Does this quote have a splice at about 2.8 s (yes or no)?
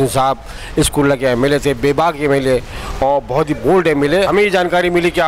no